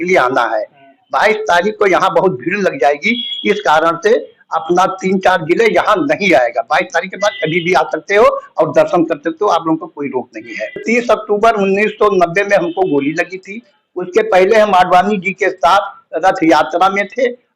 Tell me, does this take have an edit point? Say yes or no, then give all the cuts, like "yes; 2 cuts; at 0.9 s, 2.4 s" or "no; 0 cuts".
yes; 1 cut; at 10.8 s